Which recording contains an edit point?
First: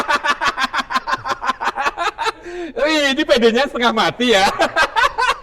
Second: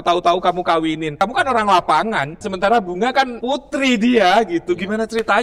second; 3 cuts; at 1.1 s, 2.4 s, 3.4 s

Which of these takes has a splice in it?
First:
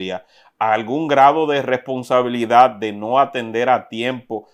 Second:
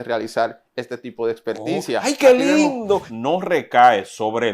second; 1 cut; at 3.0 s

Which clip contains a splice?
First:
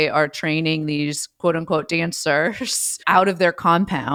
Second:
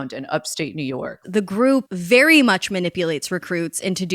second; 1 cut; at 1.2 s

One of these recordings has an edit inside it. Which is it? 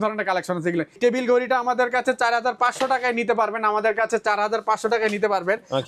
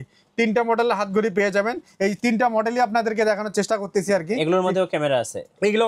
first; 1 cut; at 1.0 s

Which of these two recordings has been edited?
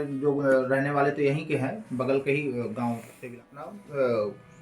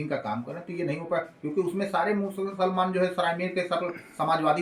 first; 1 cut; at 3.4 s

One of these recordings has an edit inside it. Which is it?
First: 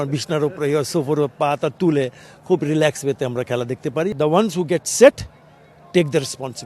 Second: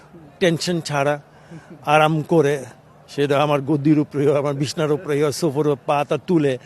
first; 1 cut; at 4.1 s

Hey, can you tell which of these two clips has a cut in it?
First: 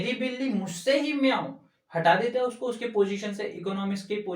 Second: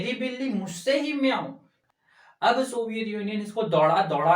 second; 1 cut; at 1.8 s

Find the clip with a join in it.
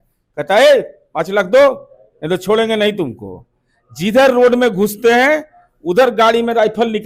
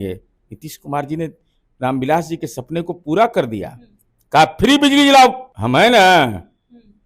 second; 1 cut; at 5.5 s

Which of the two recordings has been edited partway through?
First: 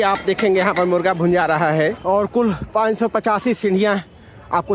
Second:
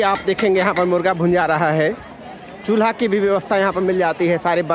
first; 1 cut; at 2.0 s

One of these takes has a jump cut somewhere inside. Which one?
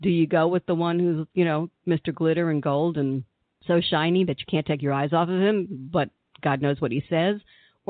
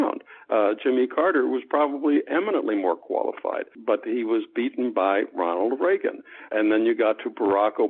second; 2 cuts; at 3.7 s, 6.5 s

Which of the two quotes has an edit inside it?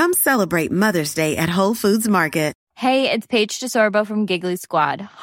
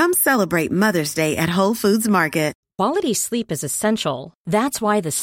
second; 1 cut; at 2.6 s

